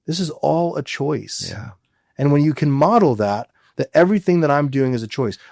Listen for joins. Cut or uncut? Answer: uncut